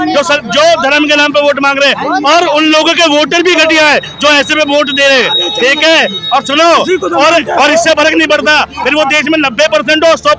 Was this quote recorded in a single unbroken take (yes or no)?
yes